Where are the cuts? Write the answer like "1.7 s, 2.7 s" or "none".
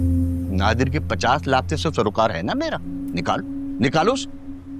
2.9 s